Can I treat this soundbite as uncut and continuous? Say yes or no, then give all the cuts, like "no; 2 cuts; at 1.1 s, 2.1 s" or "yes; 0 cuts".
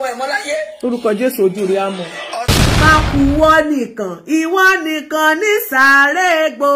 no; 1 cut; at 2.6 s